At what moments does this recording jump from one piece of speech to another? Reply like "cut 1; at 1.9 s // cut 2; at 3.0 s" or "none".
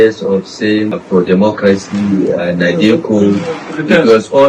cut 1; at 0.9 s